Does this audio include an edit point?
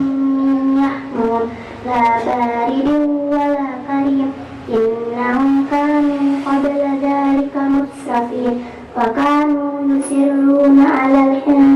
no; 0 cuts

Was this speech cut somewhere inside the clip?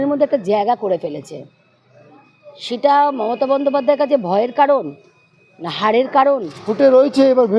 yes; 1 cut; at 6.5 s

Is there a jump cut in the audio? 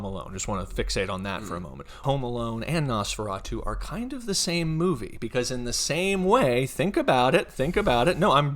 no; 0 cuts

